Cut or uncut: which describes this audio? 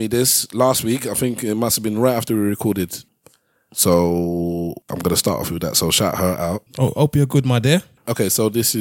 cut